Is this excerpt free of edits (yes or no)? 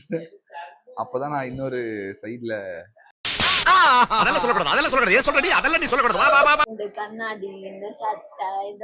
no